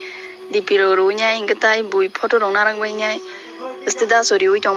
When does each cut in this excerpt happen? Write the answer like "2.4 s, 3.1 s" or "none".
none